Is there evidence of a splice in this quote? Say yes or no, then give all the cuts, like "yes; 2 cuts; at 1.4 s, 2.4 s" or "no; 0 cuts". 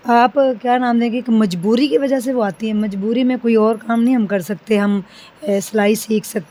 no; 0 cuts